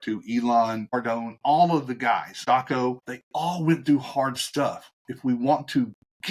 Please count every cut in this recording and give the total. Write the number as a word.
three